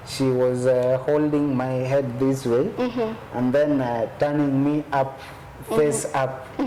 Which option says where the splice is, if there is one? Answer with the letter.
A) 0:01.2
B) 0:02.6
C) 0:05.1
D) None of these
D